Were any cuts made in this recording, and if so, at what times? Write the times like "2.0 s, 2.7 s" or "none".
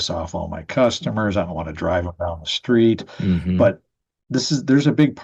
none